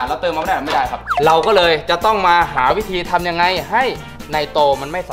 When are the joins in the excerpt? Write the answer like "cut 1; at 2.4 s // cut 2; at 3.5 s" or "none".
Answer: cut 1; at 1.1 s